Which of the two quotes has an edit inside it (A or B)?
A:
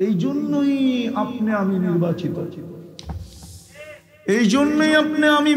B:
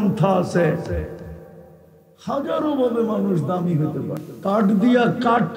B